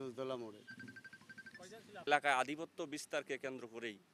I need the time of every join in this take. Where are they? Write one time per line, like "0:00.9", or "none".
0:02.1